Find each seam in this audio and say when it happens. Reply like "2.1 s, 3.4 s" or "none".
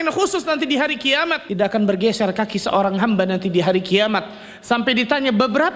1.4 s